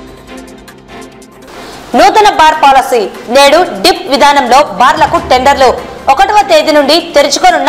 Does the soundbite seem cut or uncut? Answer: cut